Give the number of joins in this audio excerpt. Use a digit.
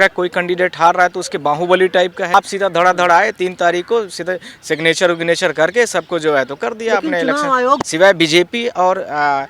2